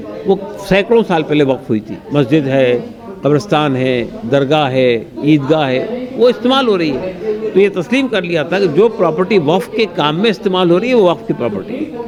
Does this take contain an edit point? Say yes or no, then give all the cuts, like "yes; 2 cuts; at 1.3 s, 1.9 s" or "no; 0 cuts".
no; 0 cuts